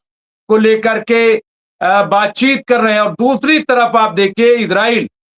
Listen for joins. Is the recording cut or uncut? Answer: uncut